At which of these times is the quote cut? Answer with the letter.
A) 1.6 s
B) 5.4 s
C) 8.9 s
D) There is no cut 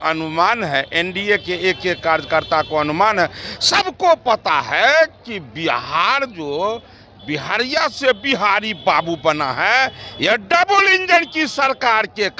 D